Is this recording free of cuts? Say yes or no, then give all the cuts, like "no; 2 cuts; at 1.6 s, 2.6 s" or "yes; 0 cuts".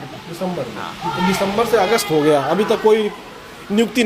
yes; 0 cuts